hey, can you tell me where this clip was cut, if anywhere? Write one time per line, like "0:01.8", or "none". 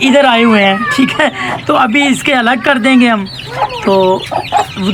none